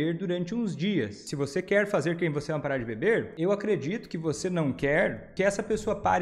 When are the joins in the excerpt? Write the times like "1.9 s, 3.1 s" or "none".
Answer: 1.2 s, 3.3 s, 5.2 s